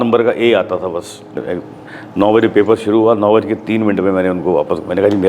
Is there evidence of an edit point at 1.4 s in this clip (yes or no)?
yes